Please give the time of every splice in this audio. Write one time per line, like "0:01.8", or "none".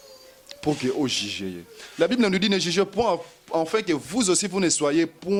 none